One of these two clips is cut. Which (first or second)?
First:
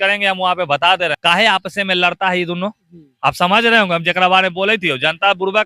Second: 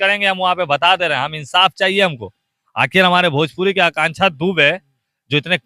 first